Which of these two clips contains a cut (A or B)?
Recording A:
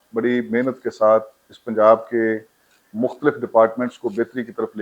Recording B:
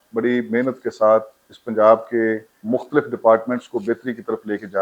B